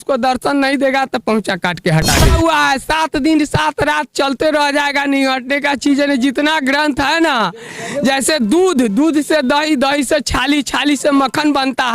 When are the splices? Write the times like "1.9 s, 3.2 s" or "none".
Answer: 2.3 s